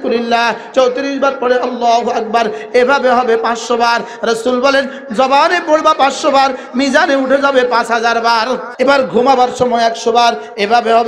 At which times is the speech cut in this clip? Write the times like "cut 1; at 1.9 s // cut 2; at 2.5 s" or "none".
cut 1; at 8.6 s